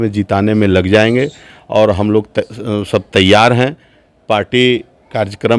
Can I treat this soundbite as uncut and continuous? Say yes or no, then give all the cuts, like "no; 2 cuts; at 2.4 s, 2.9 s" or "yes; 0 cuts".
yes; 0 cuts